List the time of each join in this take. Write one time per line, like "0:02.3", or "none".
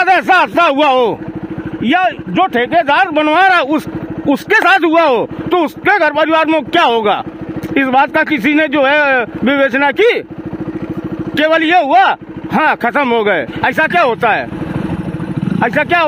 none